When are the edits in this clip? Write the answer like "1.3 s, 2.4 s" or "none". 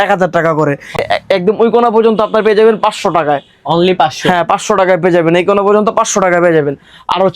1.0 s